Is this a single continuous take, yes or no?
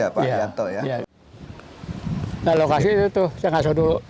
no